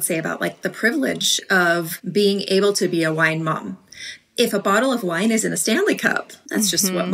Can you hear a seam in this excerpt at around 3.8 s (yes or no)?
yes